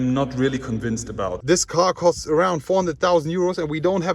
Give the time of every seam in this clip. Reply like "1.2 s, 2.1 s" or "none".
1.4 s